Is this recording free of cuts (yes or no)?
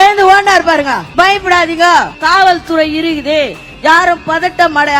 no